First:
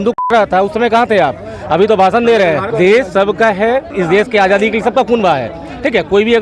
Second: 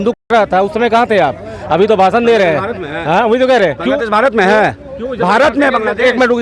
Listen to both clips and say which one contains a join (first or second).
first